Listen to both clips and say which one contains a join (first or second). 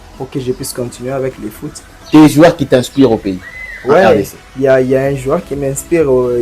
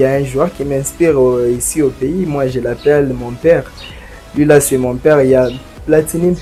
first